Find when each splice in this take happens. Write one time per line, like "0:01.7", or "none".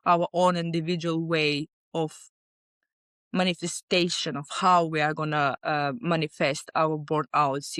none